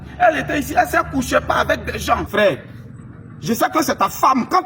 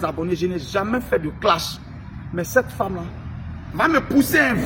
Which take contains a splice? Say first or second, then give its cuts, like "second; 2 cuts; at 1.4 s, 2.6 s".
first; 1 cut; at 2.3 s